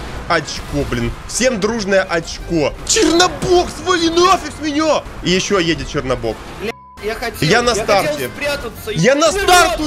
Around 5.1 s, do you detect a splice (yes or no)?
yes